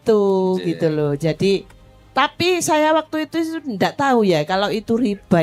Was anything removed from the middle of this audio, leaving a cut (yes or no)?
no